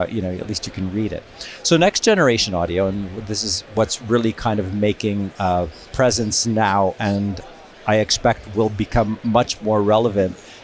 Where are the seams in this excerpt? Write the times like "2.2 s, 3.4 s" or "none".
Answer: none